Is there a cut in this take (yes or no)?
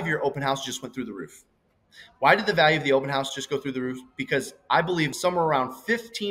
yes